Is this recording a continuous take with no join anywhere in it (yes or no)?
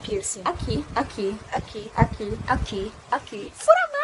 yes